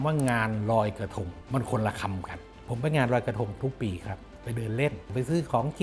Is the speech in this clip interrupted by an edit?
yes; 3 cuts; at 1.3 s, 2.5 s, 5.0 s

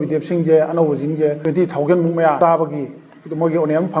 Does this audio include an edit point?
yes; 2 cuts; at 1.4 s, 2.4 s

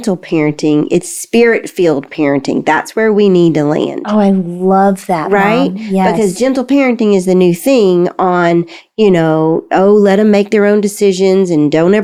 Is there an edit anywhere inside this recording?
no; 0 cuts

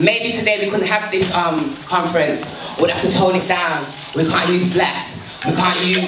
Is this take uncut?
no; 1 cut; at 3.8 s

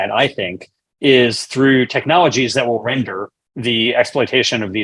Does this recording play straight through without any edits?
yes; 0 cuts

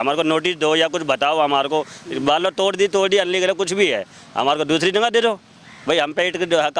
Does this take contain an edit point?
no; 0 cuts

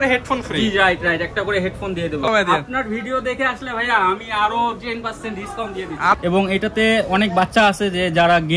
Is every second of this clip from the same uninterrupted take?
no; 2 cuts; at 2.3 s, 6.2 s

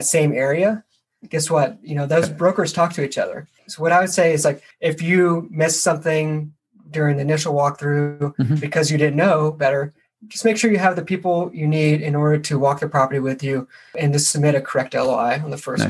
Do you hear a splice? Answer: yes; 3 cuts; at 3.6 s, 4.7 s, 14.0 s

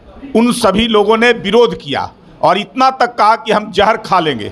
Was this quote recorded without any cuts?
yes; 0 cuts

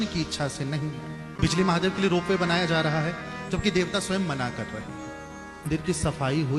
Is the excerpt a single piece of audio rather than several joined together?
no; 2 cuts; at 1.4 s, 5.7 s

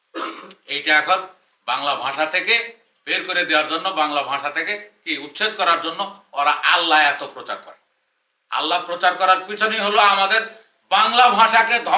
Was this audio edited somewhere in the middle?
no; 0 cuts

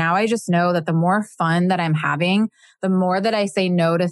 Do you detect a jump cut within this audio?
no; 0 cuts

